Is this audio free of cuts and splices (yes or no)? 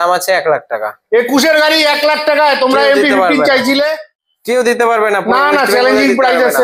yes